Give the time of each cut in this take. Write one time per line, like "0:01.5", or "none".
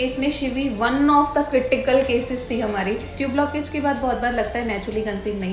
0:03.1